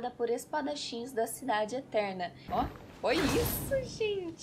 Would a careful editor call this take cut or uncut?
cut